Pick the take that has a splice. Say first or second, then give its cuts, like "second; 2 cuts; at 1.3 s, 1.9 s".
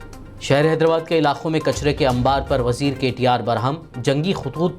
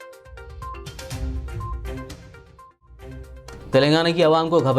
second; 1 cut; at 3.1 s